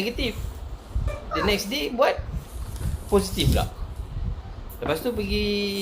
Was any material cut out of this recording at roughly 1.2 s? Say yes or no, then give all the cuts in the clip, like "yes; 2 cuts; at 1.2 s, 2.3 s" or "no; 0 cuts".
yes; 1 cut; at 1.2 s